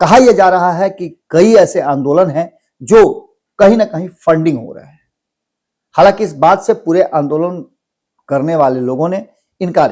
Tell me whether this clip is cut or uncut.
uncut